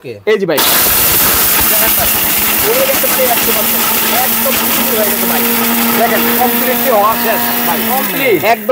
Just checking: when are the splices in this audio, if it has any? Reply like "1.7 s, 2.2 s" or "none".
none